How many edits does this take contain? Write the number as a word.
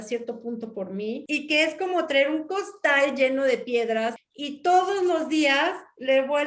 two